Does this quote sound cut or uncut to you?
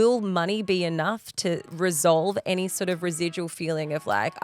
uncut